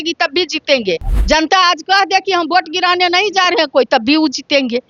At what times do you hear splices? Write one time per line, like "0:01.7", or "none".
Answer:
0:01.1